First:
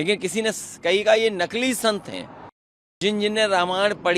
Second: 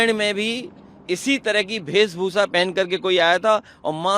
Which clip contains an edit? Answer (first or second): first